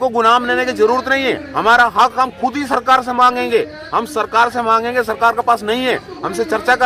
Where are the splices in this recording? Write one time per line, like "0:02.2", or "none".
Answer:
none